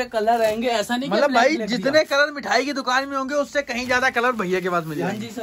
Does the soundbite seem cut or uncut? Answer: uncut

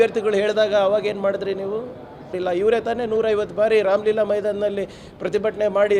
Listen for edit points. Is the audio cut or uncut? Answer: cut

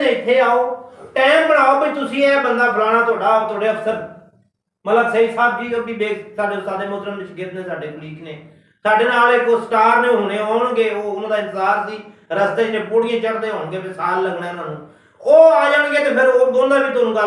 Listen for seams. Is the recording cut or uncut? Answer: uncut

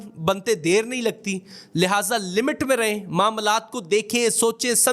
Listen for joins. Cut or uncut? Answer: uncut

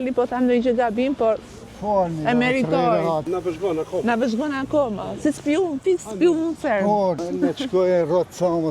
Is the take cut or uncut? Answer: cut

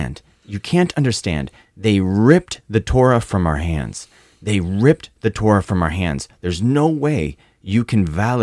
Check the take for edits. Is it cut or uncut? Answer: uncut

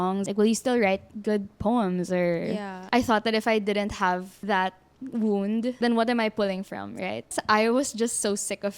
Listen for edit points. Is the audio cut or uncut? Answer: cut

